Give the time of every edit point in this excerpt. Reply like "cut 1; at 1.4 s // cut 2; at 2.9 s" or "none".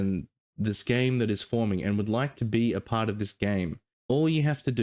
cut 1; at 3.9 s